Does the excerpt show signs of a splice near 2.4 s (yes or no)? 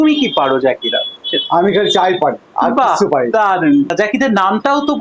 no